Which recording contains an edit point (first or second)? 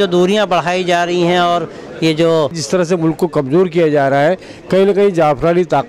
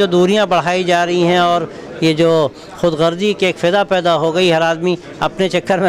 first